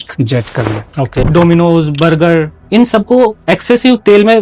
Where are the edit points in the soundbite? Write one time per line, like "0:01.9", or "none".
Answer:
0:01.3
0:02.6